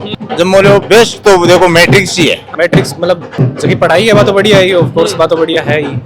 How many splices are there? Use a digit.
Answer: 2